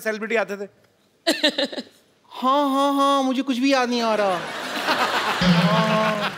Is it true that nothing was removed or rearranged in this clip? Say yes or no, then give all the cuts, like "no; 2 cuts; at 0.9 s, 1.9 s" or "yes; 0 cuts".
yes; 0 cuts